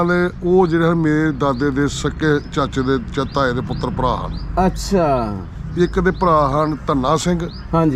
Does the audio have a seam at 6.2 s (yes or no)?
no